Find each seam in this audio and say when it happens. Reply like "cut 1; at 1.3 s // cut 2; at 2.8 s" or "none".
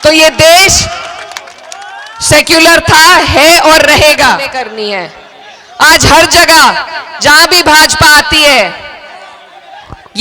cut 1; at 4.6 s

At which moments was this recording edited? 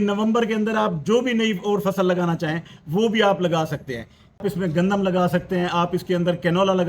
cut 1; at 4.4 s

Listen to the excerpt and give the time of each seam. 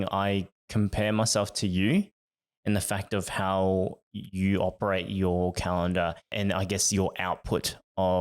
cut 1; at 6.3 s

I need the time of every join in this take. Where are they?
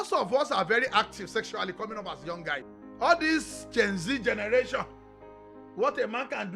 cut 1; at 2.7 s

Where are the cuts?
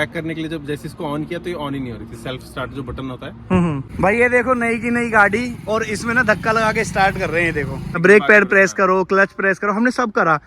cut 1; at 3.9 s // cut 2; at 8.0 s

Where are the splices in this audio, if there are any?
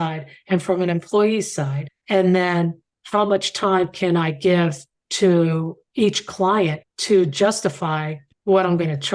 none

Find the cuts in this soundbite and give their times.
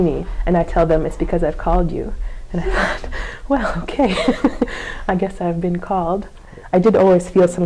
cut 1; at 6.4 s

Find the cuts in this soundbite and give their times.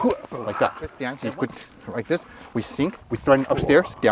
cut 1; at 1.1 s

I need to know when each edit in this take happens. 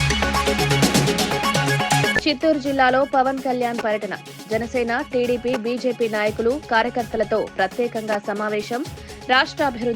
cut 1; at 2.1 s

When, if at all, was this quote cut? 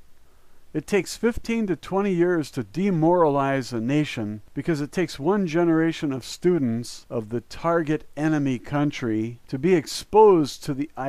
cut 1; at 3.7 s

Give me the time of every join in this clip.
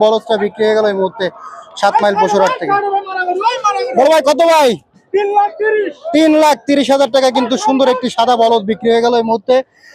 none

